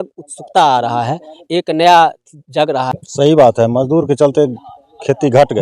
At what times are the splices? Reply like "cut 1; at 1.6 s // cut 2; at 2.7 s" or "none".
cut 1; at 2.9 s

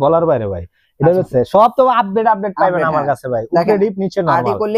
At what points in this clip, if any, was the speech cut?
cut 1; at 1.3 s

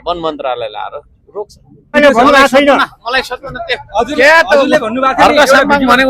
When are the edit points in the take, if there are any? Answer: cut 1; at 1.9 s

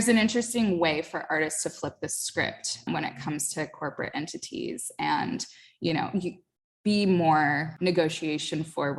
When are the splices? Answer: cut 1; at 2.9 s // cut 2; at 7.7 s

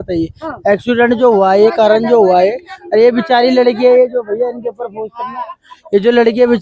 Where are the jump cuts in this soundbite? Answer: none

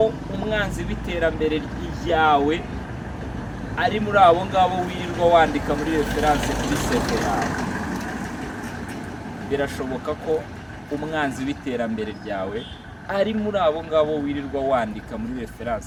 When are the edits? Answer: none

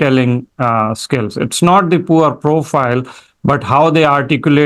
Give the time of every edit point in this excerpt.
none

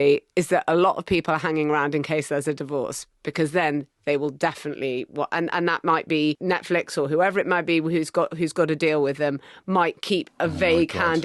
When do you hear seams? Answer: none

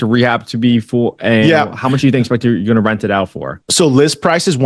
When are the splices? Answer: none

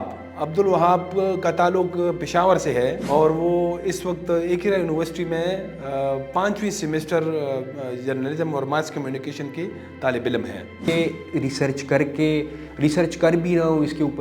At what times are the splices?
cut 1; at 3.0 s // cut 2; at 10.9 s

